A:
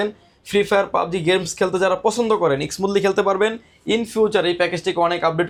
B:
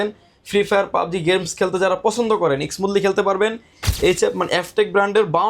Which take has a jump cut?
B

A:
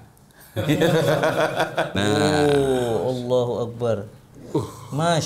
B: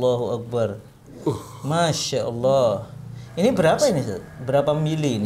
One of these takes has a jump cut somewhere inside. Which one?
A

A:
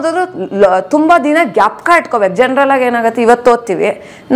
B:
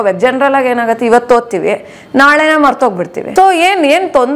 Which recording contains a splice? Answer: B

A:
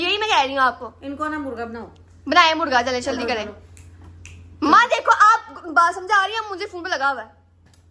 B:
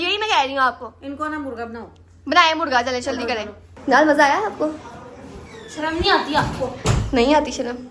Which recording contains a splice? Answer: B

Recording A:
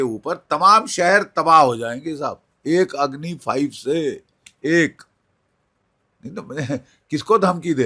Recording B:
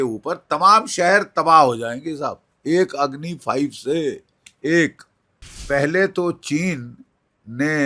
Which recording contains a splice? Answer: B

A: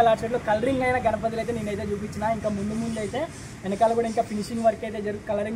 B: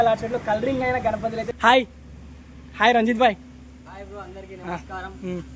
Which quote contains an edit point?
B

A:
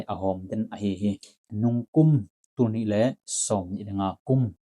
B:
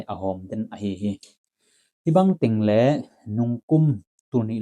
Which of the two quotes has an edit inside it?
A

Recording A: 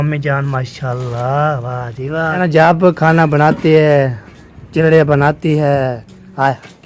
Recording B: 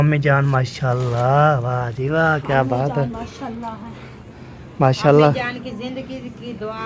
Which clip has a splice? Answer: A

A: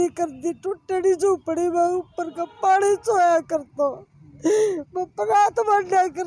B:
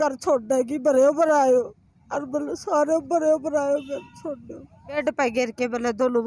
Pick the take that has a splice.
B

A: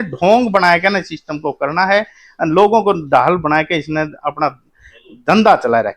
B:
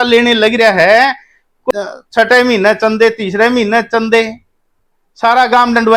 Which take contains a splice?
B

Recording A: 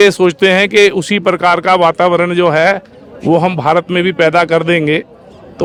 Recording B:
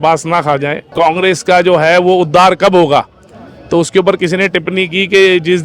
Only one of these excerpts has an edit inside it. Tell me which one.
B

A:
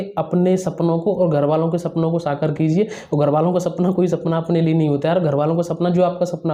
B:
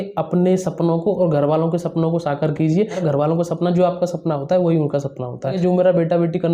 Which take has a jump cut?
B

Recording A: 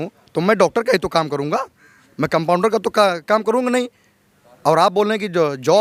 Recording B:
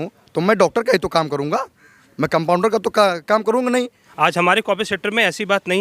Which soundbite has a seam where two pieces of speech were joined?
B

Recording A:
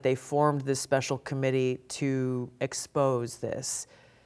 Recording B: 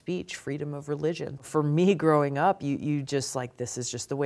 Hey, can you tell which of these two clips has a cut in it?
B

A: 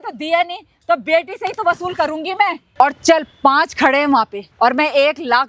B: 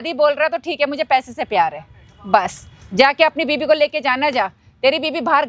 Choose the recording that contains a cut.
A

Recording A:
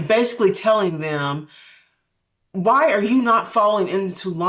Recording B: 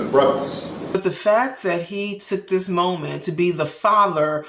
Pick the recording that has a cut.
B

